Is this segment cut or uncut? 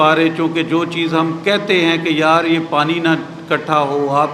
uncut